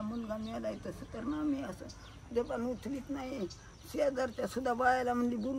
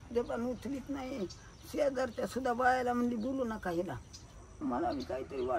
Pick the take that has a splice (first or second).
second